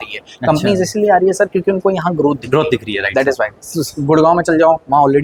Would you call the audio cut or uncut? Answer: uncut